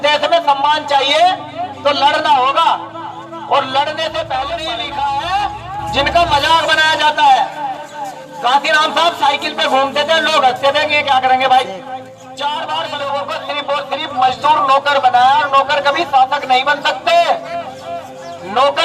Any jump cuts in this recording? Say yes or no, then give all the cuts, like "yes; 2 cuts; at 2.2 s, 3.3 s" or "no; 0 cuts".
yes; 2 cuts; at 4.6 s, 12.9 s